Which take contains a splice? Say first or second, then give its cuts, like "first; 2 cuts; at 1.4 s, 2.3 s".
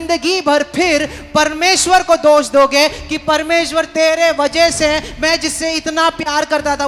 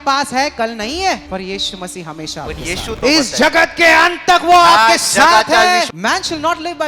second; 3 cuts; at 1.3 s, 3.0 s, 5.9 s